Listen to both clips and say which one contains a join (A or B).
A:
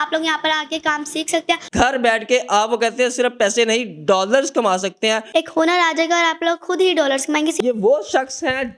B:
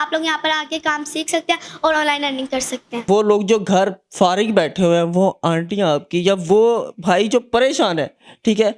A